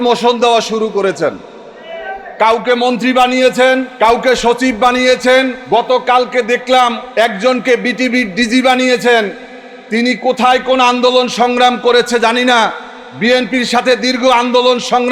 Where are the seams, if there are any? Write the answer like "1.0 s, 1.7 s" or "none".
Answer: 3.9 s, 5.6 s, 7.0 s